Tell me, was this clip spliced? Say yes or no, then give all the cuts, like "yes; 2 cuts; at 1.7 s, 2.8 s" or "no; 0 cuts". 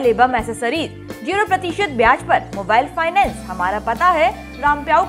no; 0 cuts